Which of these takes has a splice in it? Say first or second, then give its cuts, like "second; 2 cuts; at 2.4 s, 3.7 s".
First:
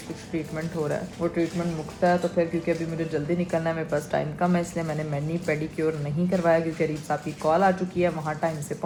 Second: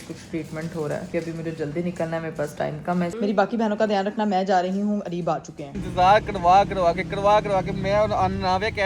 second; 3 cuts; at 1.1 s, 3.1 s, 5.8 s